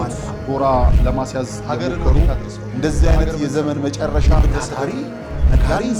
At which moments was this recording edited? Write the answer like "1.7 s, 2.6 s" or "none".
none